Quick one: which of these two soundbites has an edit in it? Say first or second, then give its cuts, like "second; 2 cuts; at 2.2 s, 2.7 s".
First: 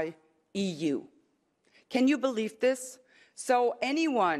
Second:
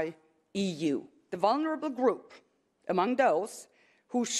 second; 1 cut; at 1.2 s